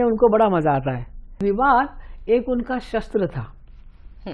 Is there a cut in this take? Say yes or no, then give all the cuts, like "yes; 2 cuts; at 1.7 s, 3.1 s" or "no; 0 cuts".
yes; 1 cut; at 1.4 s